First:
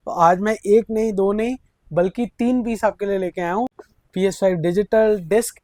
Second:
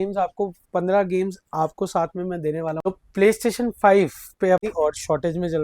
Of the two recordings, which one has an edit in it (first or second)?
second